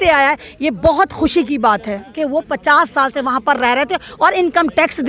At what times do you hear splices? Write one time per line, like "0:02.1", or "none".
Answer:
0:02.1